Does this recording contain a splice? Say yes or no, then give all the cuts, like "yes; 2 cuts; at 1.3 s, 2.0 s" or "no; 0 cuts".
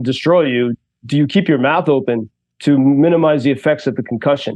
no; 0 cuts